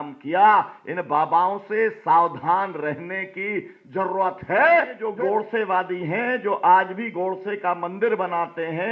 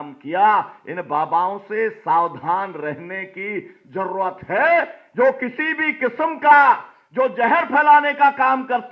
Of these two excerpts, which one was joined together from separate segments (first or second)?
first